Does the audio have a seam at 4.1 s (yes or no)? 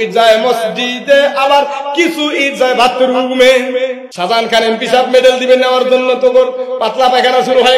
yes